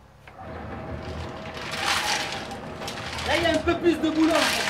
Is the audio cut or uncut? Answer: uncut